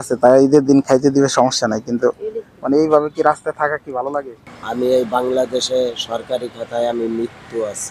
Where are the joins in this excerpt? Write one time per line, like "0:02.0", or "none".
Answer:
0:04.4